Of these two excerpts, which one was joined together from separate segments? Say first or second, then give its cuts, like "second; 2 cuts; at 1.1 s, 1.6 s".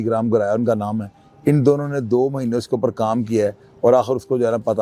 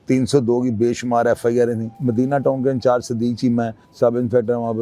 second; 2 cuts; at 2.0 s, 3.8 s